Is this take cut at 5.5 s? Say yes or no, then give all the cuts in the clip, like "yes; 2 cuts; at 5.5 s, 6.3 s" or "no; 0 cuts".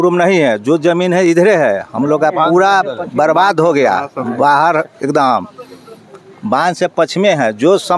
no; 0 cuts